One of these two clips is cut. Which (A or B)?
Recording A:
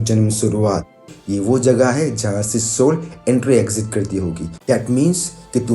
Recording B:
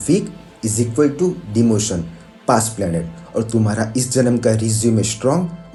A